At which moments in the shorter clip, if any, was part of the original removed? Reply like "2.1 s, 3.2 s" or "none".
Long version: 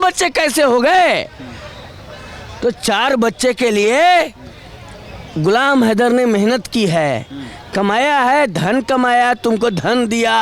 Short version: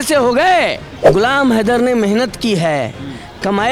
0.9 s